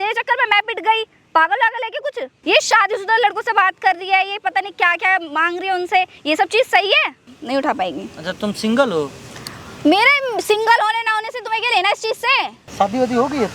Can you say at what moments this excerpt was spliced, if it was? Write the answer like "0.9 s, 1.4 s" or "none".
2.3 s, 7.3 s, 12.6 s